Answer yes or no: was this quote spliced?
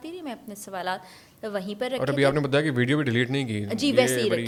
no